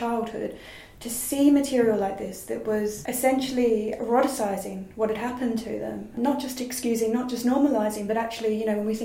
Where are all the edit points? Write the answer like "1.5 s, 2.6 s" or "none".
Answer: 3.9 s